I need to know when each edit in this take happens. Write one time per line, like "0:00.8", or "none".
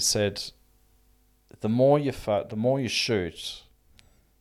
none